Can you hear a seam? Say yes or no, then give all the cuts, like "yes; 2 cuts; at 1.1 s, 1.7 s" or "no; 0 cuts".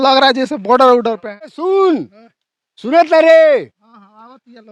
yes; 1 cut; at 1.6 s